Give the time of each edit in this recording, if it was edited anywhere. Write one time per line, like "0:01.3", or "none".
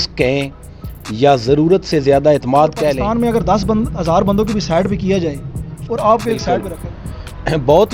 0:03.0
0:06.7